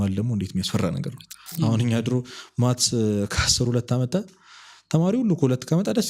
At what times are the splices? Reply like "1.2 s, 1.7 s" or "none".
1.5 s